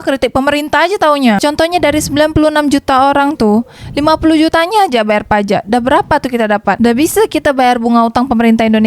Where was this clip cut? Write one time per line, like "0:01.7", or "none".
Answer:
0:01.4